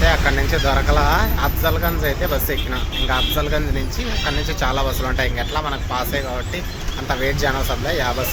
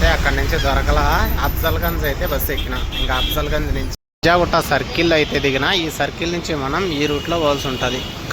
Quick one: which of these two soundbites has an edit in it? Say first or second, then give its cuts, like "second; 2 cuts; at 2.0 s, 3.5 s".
second; 1 cut; at 3.9 s